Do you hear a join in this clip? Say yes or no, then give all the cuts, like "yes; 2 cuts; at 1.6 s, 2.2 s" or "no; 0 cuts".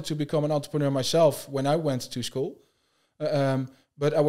no; 0 cuts